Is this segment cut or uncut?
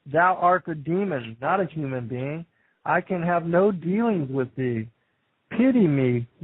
cut